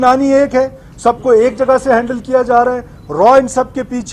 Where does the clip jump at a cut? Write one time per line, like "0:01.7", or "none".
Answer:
none